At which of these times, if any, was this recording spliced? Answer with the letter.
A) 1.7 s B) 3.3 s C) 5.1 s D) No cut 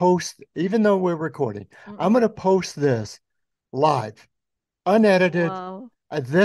D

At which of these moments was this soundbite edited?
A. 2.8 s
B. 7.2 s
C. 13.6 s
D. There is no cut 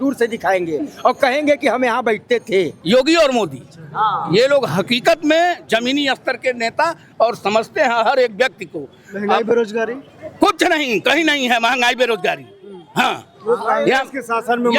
A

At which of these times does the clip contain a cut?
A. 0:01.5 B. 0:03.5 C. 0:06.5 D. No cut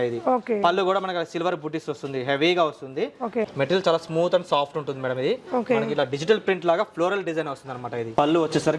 B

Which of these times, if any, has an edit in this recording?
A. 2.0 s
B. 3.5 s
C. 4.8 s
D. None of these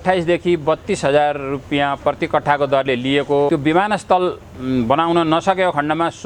B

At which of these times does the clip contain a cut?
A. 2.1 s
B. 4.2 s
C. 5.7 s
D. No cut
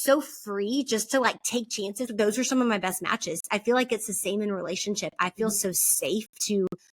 A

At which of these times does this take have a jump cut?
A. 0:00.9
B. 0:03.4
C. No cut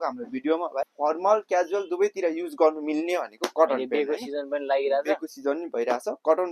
A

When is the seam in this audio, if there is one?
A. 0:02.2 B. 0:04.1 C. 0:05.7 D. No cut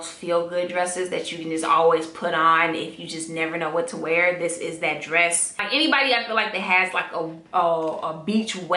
C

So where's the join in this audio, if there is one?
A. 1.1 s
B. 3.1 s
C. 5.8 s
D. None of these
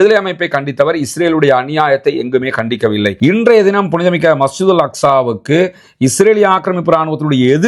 B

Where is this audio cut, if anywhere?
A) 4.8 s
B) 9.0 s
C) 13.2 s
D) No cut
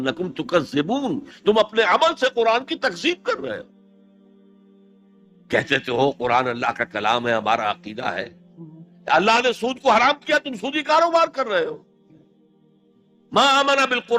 D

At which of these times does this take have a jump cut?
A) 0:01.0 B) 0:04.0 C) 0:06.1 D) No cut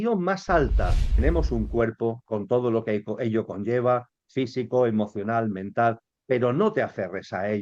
A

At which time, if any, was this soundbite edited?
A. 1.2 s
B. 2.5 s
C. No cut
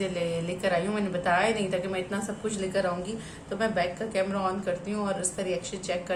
C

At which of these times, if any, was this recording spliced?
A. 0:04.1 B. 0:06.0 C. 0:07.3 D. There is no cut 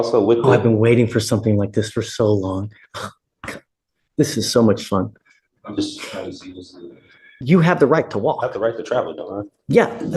C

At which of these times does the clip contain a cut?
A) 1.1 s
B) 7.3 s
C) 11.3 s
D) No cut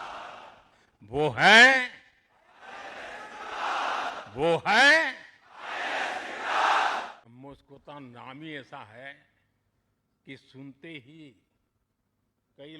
B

